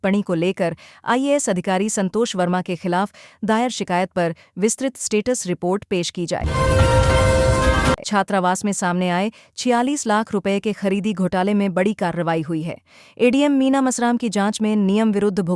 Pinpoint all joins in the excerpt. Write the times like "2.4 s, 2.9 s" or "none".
6.5 s, 8.0 s